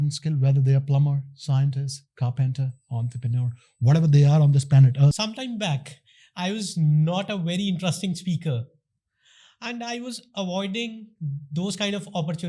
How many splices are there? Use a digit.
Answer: 1